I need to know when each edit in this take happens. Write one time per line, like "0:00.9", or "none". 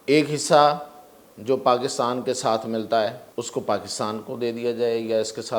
0:03.2